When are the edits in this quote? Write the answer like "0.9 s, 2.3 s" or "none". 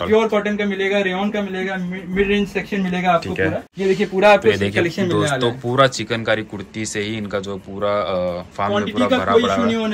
3.7 s